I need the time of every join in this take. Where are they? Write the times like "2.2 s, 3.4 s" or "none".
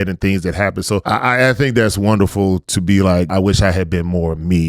1.0 s, 3.3 s